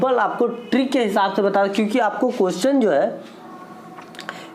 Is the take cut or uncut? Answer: uncut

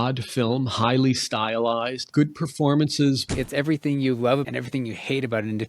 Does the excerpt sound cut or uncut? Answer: cut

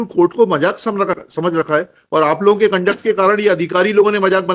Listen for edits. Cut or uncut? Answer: cut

